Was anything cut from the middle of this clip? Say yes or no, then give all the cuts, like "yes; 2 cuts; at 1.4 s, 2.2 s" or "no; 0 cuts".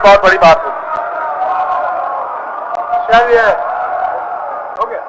no; 0 cuts